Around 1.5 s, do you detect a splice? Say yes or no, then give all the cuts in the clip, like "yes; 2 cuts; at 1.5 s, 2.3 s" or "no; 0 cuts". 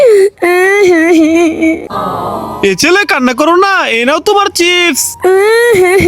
yes; 1 cut; at 1.5 s